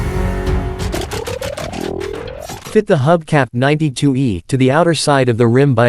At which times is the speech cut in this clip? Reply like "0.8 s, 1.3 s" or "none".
none